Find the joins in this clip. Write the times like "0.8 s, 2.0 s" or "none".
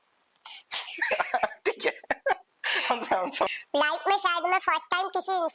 3.5 s